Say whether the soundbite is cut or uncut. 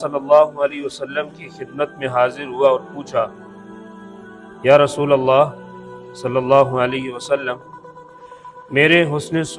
uncut